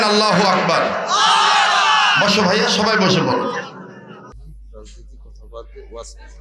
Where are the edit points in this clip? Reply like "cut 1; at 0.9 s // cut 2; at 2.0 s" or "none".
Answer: cut 1; at 4.3 s